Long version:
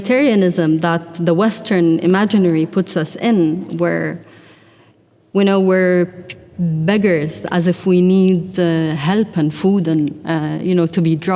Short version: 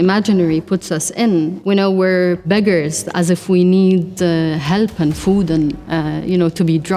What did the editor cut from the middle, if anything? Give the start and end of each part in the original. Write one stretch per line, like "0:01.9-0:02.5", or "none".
0:03.6-0:05.3
0:06.1-0:06.8